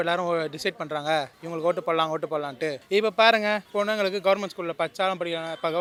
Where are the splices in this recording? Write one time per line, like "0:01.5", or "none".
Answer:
none